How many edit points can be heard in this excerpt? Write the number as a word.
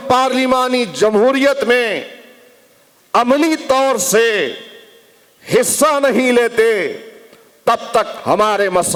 zero